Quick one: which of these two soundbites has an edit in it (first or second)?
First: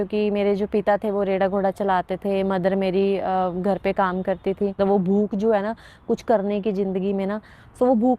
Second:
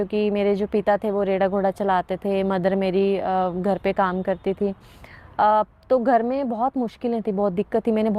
first